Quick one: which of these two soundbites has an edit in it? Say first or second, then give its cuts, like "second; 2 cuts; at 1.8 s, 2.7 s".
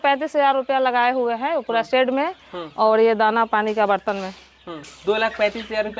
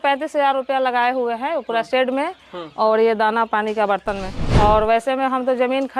second; 1 cut; at 4.4 s